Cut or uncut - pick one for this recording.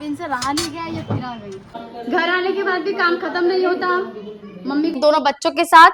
cut